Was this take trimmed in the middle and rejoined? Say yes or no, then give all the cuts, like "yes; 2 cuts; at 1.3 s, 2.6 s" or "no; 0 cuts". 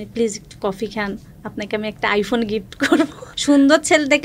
yes; 1 cut; at 3.3 s